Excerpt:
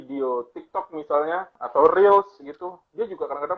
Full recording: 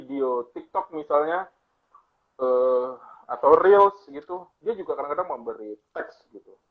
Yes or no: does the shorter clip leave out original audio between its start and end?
yes